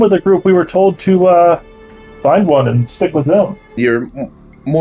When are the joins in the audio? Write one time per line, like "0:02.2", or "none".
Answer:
0:03.8